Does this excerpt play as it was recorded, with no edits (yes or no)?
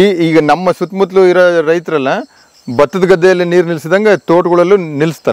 yes